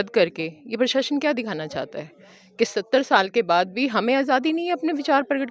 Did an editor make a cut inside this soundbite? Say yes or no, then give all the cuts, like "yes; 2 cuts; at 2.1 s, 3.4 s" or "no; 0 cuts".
no; 0 cuts